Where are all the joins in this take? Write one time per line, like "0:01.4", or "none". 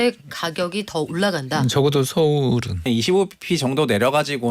0:02.8